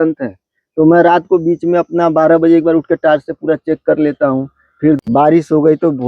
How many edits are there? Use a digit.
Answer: 1